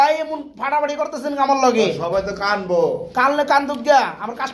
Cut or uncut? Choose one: uncut